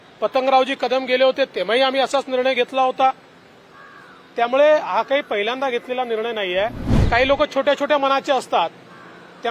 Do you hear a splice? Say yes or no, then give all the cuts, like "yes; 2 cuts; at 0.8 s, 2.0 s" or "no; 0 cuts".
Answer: yes; 1 cut; at 6.9 s